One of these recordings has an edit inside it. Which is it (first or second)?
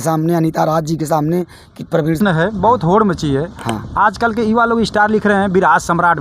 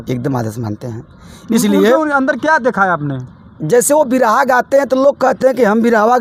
first